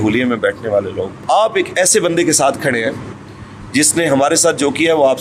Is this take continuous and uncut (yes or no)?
no